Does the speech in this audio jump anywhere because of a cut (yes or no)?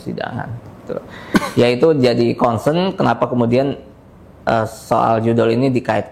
no